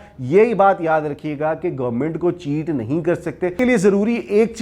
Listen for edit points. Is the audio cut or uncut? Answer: cut